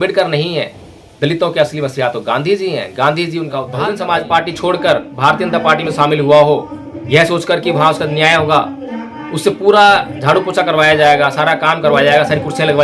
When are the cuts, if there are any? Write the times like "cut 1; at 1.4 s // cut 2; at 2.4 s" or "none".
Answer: cut 1; at 3.7 s